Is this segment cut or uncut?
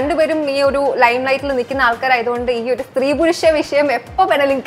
uncut